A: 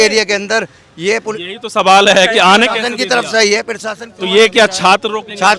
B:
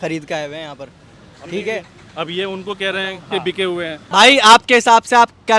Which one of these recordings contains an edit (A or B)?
B